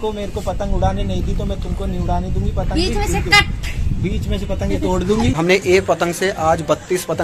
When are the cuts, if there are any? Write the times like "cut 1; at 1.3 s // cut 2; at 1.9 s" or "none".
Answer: cut 1; at 5.4 s

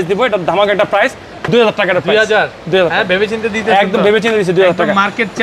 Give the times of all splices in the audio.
cut 1; at 1.4 s

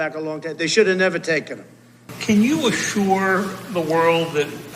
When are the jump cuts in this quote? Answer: cut 1; at 2.1 s

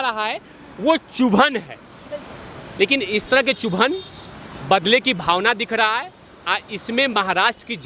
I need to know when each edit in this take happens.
none

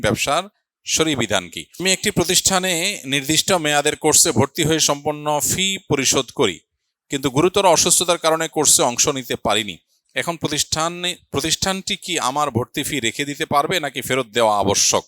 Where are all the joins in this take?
cut 1; at 1.8 s

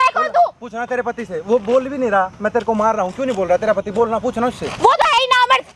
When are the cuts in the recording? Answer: none

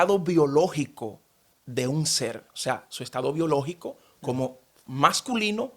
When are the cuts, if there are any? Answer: none

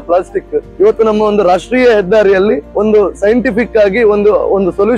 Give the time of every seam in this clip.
none

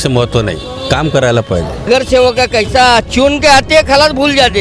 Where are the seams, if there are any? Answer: cut 1; at 1.9 s

